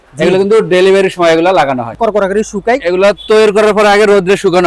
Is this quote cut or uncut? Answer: cut